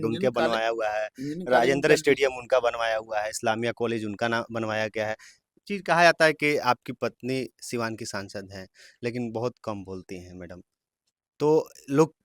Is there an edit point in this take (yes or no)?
yes